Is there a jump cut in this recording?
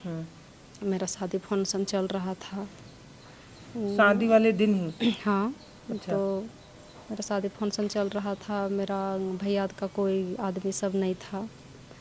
no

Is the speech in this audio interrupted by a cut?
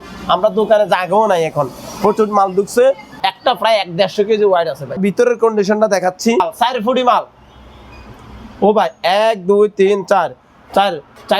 yes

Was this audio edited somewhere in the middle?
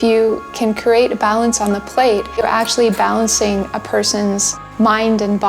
yes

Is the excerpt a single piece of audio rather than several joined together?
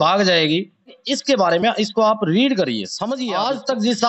no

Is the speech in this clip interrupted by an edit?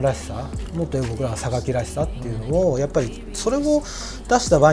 no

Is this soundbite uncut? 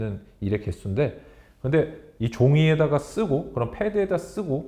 yes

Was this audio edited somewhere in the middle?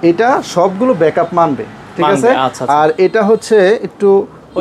no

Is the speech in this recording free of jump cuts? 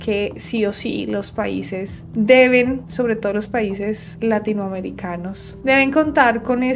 yes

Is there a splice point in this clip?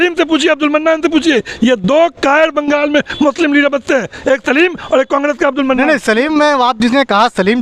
no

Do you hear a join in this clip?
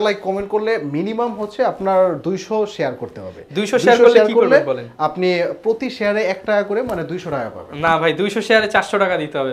no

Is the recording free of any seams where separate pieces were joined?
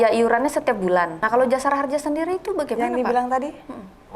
no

